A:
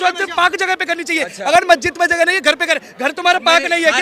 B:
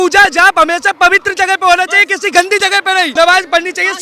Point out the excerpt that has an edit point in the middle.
B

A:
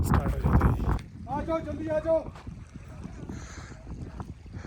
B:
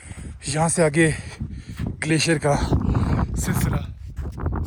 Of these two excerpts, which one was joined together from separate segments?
A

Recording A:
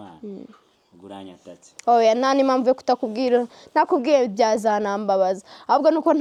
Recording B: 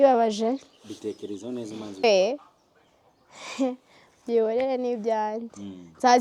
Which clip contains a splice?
B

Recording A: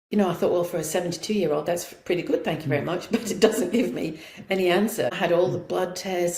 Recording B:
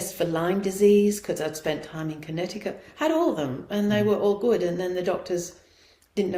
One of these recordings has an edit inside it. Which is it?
A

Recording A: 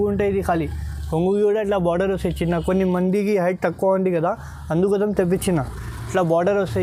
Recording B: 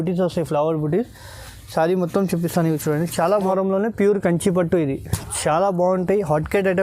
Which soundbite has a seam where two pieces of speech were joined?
B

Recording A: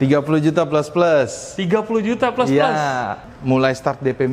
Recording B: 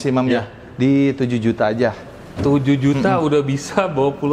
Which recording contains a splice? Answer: A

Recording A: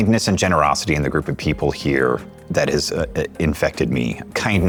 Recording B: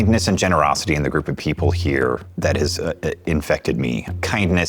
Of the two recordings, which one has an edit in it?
B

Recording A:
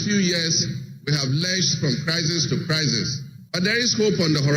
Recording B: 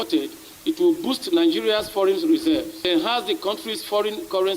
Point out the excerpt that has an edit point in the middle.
B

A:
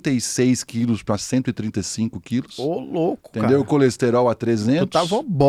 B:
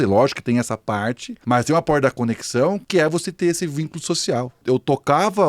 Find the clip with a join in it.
B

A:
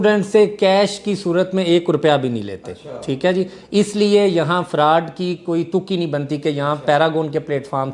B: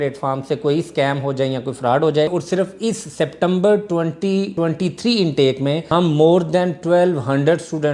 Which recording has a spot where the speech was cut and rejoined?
B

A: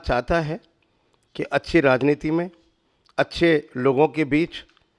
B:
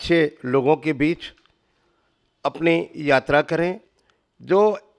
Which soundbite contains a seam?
B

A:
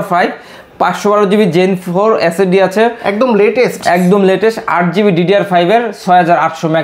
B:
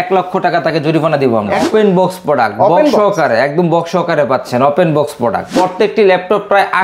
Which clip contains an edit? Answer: B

